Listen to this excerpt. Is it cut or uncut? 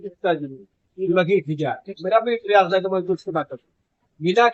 uncut